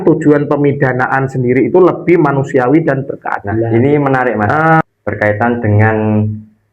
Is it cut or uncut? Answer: cut